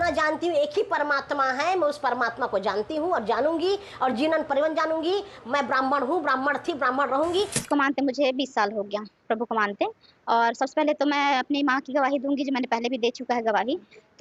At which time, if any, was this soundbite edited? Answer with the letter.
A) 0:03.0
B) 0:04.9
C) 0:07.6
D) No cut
C